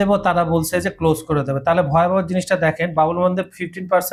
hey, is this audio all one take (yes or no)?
yes